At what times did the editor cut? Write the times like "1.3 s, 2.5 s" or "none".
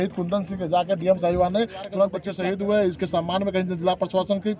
2.3 s

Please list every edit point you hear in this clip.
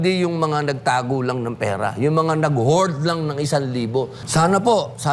4.2 s

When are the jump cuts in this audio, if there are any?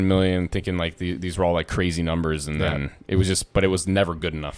none

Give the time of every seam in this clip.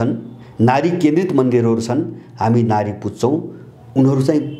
none

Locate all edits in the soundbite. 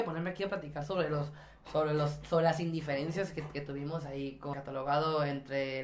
4.5 s

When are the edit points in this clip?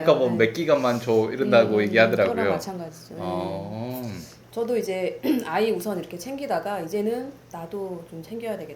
4.3 s

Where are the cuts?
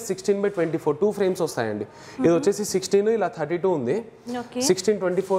none

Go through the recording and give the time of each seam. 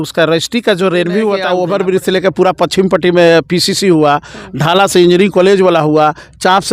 1.5 s

